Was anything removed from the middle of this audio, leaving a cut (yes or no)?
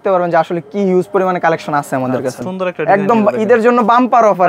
yes